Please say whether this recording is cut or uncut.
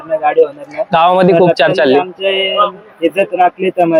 uncut